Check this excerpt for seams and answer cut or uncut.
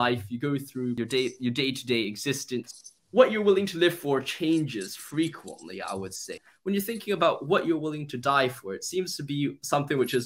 cut